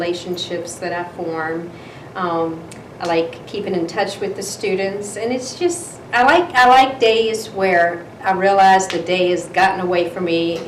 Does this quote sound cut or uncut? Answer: uncut